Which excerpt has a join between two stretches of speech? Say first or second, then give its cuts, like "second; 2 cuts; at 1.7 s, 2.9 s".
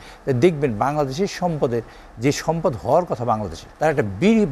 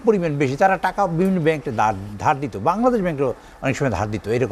first; 1 cut; at 3.6 s